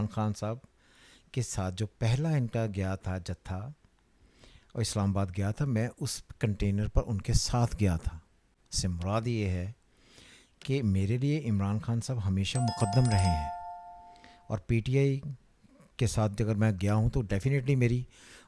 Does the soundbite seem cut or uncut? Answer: uncut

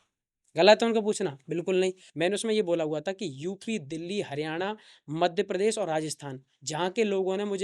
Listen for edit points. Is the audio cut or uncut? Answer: cut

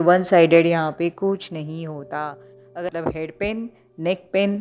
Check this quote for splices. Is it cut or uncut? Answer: cut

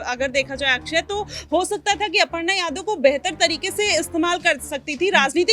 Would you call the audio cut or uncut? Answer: uncut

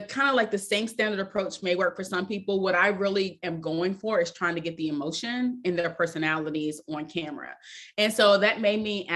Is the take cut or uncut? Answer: uncut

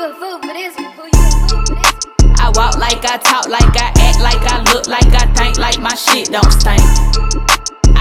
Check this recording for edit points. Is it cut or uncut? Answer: uncut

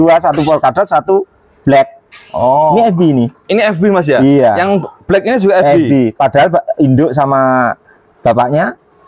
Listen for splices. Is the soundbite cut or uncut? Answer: uncut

